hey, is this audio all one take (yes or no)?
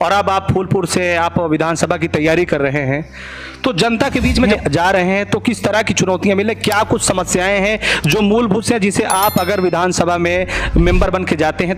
no